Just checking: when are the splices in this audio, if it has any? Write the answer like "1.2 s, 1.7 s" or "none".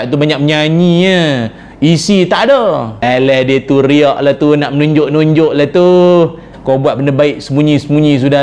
3.0 s, 6.5 s